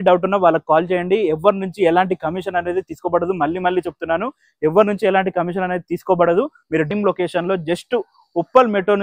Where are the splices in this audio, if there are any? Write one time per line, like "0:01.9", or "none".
0:06.9